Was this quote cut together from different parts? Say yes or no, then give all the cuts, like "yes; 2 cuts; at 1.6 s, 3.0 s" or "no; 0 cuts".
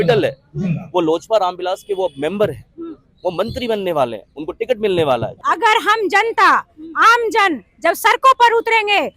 yes; 1 cut; at 5.3 s